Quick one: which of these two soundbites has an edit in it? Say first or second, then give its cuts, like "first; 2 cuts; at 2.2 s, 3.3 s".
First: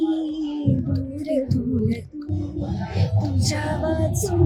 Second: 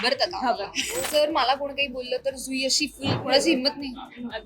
second; 2 cuts; at 1.0 s, 3.2 s